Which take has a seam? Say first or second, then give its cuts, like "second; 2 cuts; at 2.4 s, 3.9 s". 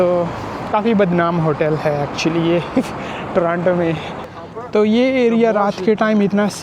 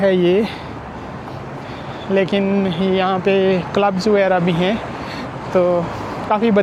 first; 1 cut; at 4.2 s